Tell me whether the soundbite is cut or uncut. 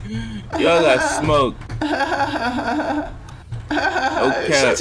uncut